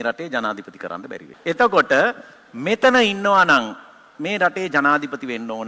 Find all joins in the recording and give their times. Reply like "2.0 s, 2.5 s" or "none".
1.3 s